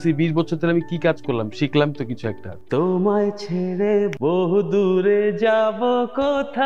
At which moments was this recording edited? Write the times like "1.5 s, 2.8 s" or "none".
2.5 s, 4.1 s